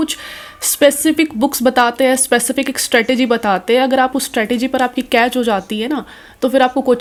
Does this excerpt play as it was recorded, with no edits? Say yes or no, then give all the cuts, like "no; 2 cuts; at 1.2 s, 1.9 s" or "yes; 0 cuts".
yes; 0 cuts